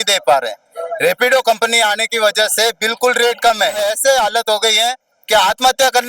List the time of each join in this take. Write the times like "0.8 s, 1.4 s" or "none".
3.8 s